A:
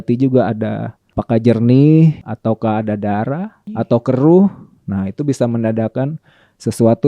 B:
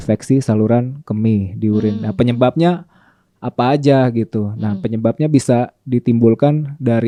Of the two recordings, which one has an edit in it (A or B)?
A